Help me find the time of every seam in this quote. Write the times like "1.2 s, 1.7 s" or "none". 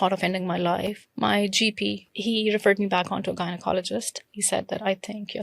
1.0 s, 2.2 s